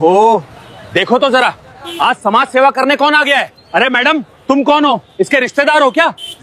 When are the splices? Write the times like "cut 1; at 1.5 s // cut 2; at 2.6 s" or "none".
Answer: none